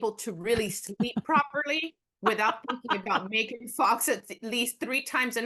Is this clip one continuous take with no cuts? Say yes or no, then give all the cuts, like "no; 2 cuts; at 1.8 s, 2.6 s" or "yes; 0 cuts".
yes; 0 cuts